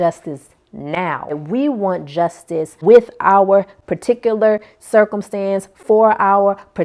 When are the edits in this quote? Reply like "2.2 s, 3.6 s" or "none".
1.3 s, 2.7 s